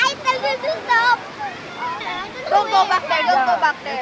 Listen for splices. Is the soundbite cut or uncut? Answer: cut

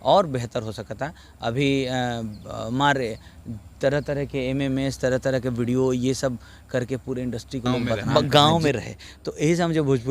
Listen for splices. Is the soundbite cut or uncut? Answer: cut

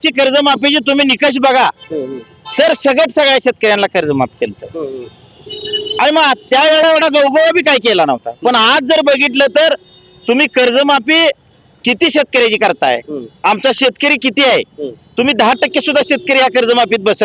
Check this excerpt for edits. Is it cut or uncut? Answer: uncut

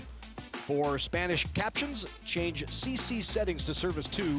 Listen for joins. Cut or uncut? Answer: uncut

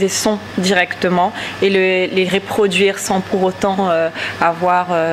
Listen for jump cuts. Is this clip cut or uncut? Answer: uncut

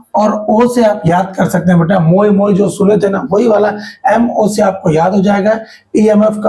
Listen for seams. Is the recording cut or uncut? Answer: uncut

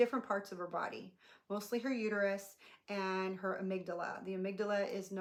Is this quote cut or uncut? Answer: uncut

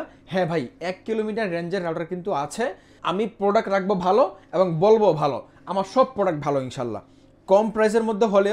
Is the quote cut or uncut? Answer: cut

